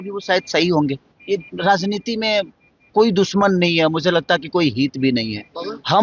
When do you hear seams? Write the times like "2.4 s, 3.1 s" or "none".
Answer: 1.1 s